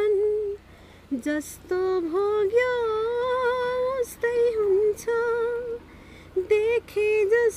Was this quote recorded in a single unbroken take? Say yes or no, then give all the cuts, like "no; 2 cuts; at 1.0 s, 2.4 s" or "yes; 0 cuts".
yes; 0 cuts